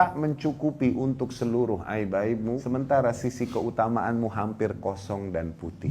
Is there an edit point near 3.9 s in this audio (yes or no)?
no